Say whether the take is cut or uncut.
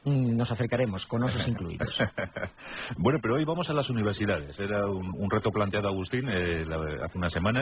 cut